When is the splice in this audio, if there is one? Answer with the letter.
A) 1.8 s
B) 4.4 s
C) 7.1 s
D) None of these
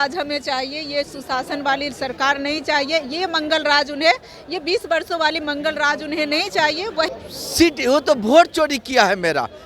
C